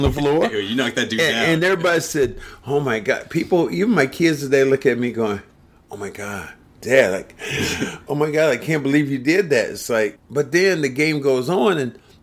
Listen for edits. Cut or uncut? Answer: cut